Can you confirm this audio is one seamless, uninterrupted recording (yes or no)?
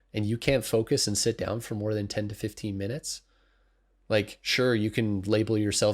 yes